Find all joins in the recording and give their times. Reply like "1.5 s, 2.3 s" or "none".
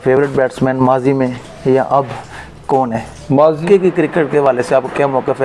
3.6 s